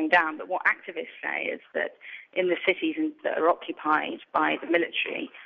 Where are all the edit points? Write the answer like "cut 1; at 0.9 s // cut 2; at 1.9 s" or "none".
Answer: cut 1; at 3.2 s